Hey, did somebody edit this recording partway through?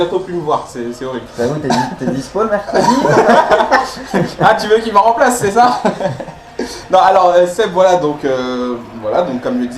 yes; 1 cut; at 2.2 s

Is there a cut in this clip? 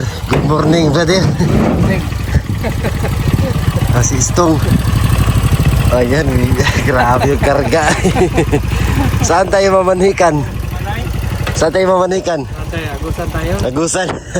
no; 0 cuts

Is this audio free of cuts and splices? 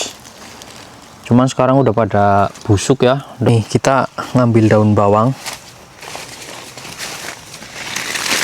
no; 1 cut; at 3.3 s

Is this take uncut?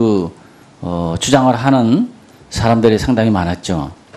no; 1 cut; at 1.3 s

